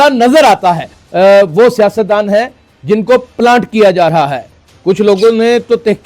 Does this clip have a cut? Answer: yes; 1 cut; at 1.0 s

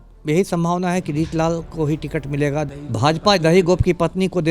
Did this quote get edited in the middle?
yes; 1 cut; at 2.7 s

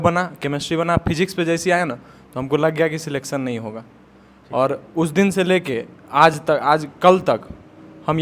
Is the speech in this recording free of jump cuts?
yes; 0 cuts

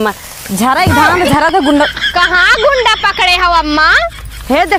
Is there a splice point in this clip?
no; 0 cuts

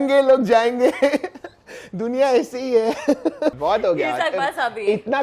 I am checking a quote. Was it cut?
yes; 1 cut; at 3.0 s

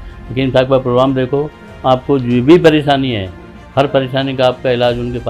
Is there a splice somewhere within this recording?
no; 0 cuts

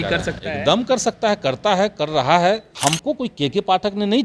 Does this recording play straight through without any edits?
no; 1 cut; at 2.7 s

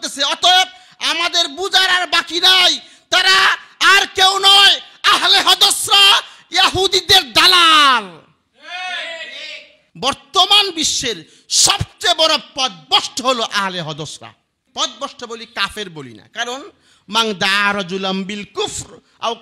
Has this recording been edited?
yes; 2 cuts; at 9.8 s, 14.6 s

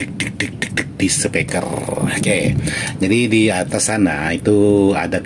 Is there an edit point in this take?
no; 0 cuts

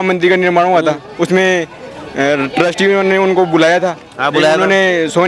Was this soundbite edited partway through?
no; 0 cuts

